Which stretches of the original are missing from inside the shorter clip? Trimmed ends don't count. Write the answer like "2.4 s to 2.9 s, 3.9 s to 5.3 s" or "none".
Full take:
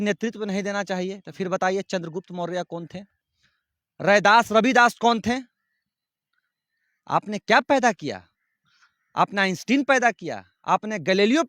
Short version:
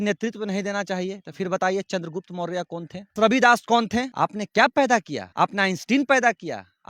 3.1 s to 4.5 s, 5.4 s to 7.0 s, 8.1 s to 9.0 s